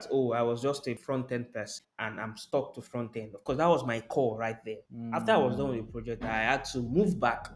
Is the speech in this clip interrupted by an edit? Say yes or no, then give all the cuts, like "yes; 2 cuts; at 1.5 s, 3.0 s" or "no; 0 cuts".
yes; 2 cuts; at 1.0 s, 1.8 s